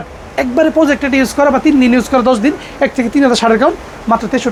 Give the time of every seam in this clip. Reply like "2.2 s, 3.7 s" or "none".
none